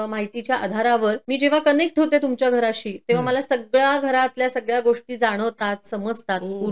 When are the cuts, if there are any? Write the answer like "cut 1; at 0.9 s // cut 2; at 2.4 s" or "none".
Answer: cut 1; at 1.2 s

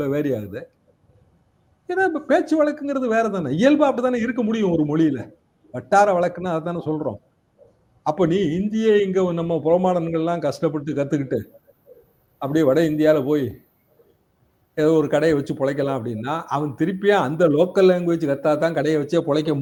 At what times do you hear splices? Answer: none

